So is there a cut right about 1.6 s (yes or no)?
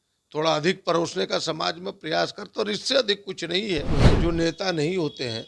no